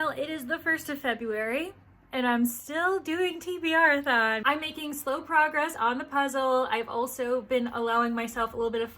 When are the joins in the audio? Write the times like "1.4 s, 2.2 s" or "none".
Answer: 4.4 s